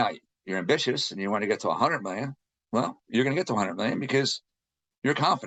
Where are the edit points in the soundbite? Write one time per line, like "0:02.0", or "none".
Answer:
none